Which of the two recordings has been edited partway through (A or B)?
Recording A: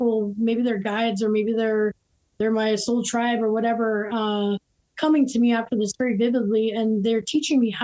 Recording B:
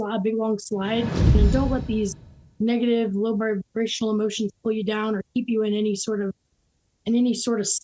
B